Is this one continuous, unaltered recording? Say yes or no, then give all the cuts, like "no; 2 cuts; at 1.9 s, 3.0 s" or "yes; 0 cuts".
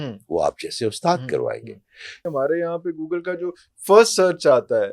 no; 1 cut; at 2.3 s